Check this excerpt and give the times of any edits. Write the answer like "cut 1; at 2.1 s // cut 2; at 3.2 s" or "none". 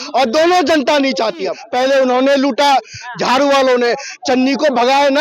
cut 1; at 1.6 s